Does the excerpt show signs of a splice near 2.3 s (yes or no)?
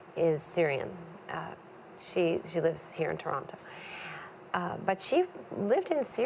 yes